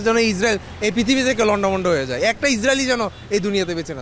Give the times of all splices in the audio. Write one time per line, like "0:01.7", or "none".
none